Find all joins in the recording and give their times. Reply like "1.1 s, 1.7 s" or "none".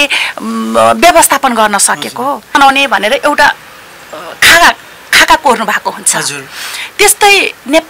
2.5 s